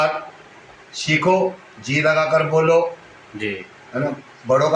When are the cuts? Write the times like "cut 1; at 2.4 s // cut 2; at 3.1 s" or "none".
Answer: none